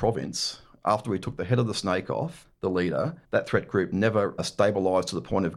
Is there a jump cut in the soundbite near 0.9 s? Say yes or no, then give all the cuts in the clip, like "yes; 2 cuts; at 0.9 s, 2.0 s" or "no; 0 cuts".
no; 3 cuts; at 2.4 s, 3.2 s, 4.4 s